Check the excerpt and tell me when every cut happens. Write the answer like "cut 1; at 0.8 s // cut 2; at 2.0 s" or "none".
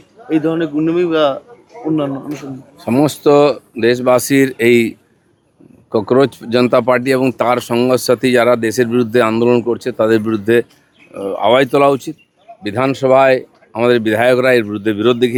none